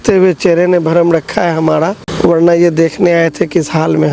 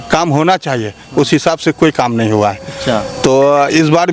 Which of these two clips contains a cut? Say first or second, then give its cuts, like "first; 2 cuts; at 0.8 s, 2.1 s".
first; 1 cut; at 2.0 s